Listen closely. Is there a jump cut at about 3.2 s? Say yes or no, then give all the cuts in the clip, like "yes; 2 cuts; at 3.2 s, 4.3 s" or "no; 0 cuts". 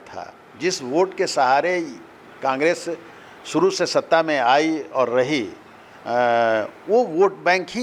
no; 0 cuts